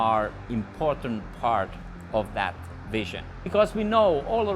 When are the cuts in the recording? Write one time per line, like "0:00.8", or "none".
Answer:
0:03.4